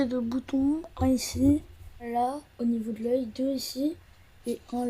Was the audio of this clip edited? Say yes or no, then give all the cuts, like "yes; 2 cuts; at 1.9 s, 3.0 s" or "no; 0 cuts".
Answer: yes; 1 cut; at 2.1 s